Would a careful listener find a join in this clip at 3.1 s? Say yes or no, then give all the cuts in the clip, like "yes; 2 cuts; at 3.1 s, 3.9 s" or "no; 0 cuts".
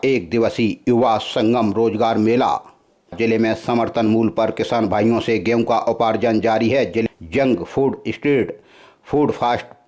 yes; 2 cuts; at 3.1 s, 7.0 s